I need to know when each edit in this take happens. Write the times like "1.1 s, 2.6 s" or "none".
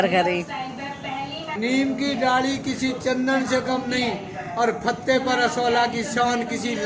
1.5 s